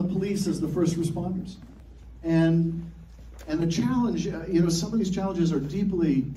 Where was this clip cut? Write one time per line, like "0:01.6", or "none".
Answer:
0:02.6